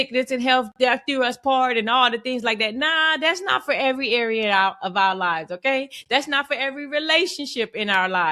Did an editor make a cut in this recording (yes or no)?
no